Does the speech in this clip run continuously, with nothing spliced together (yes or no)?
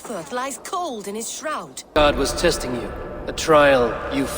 no